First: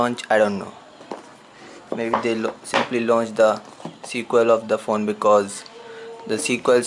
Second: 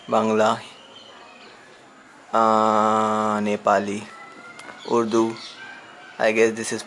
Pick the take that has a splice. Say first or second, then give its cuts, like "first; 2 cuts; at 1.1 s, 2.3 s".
first; 1 cut; at 2.9 s